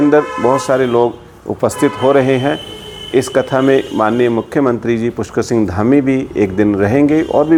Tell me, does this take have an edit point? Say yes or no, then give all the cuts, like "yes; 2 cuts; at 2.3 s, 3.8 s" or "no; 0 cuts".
no; 0 cuts